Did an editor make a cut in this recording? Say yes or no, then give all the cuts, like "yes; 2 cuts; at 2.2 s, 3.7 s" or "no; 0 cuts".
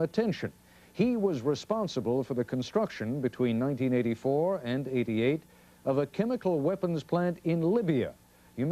yes; 1 cut; at 6.1 s